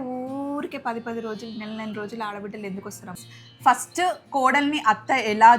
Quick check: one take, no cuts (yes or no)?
no